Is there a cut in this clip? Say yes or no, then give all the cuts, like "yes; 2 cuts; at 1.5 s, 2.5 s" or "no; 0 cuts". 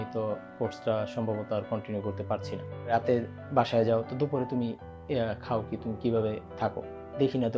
yes; 1 cut; at 2.8 s